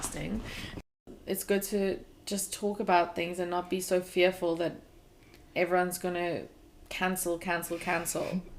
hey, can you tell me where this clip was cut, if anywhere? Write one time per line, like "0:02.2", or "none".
0:00.8
0:02.1